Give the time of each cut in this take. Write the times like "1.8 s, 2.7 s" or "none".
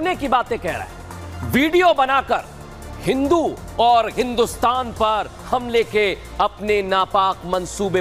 none